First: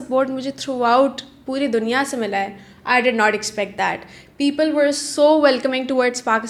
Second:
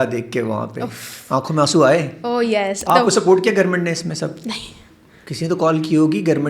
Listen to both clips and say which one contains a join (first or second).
second